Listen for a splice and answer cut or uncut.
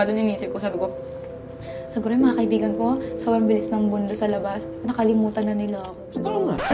uncut